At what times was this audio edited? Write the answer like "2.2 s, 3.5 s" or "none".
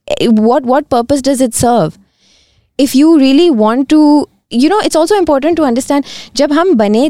none